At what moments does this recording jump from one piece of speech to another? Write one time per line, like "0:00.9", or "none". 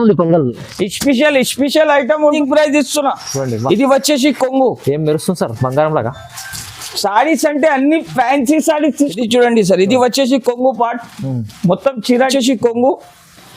0:02.4
0:09.1
0:12.3